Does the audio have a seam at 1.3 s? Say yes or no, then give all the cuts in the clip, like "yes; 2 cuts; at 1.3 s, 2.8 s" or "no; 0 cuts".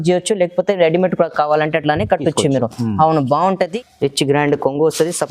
no; 1 cut; at 3.8 s